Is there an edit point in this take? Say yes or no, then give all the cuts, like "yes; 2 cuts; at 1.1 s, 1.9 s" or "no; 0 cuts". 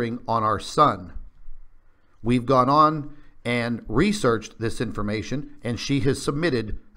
yes; 1 cut; at 5.9 s